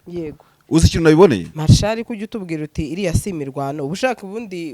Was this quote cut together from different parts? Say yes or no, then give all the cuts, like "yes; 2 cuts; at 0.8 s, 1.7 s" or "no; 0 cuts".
yes; 1 cut; at 1.5 s